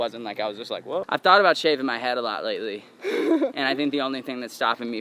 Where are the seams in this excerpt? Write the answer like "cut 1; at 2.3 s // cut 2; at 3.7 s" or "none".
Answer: cut 1; at 1.1 s